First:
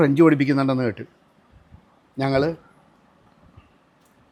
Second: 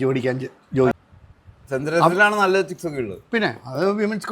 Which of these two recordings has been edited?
second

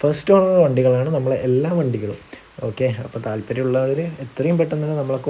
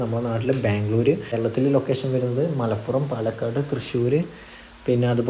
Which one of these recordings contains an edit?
second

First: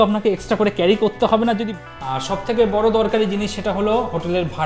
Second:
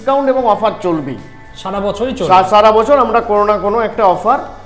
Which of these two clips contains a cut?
first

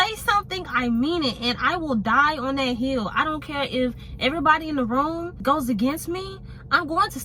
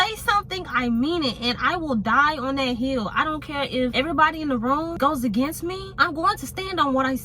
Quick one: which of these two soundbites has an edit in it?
second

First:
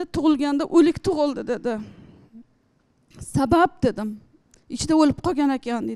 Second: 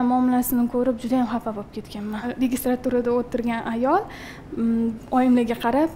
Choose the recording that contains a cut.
second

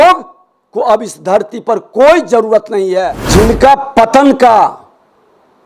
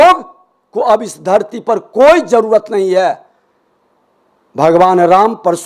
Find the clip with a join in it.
first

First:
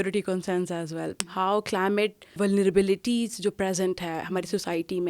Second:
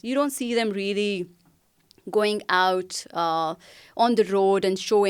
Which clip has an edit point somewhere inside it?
first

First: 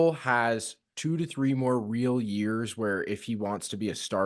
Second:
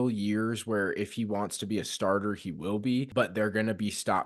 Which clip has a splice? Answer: second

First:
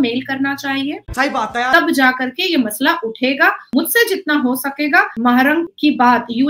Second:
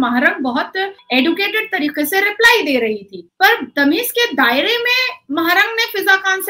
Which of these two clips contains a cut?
first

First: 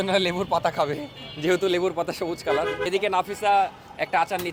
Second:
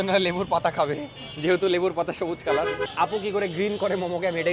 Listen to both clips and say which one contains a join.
second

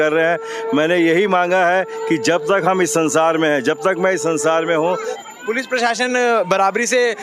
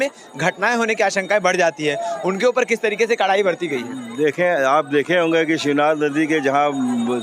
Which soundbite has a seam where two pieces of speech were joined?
first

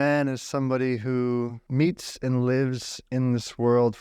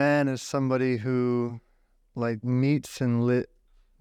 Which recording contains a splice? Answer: first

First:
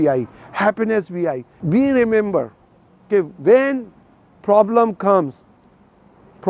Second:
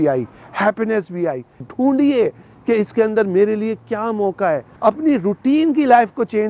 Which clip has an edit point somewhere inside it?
second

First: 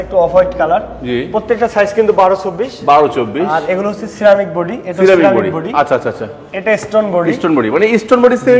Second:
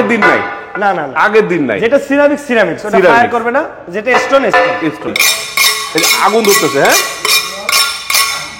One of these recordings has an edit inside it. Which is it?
second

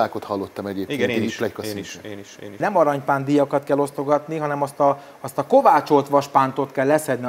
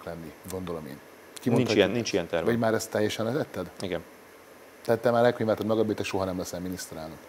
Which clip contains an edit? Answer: first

